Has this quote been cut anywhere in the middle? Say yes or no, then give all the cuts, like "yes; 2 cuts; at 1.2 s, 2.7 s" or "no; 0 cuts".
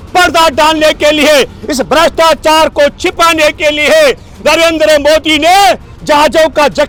no; 0 cuts